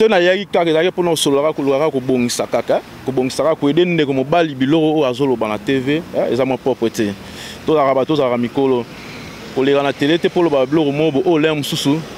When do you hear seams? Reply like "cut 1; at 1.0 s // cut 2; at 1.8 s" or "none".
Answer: none